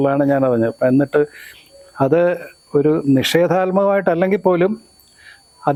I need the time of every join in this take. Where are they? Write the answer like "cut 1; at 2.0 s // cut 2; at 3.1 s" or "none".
none